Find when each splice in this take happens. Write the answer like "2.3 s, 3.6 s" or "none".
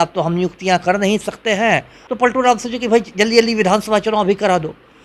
2.0 s